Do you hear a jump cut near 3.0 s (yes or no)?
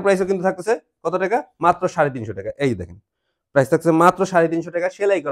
no